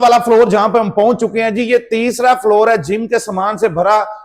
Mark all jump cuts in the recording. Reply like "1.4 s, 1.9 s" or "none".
none